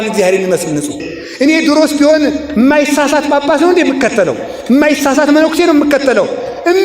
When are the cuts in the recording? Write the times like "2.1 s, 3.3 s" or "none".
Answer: 1.1 s